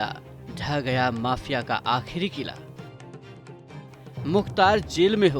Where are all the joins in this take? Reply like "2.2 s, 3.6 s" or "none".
2.5 s, 4.2 s